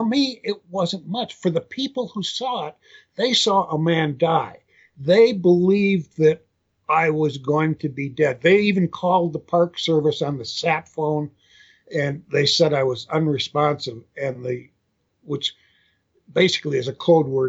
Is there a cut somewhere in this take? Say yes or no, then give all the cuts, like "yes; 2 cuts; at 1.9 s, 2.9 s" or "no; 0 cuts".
no; 0 cuts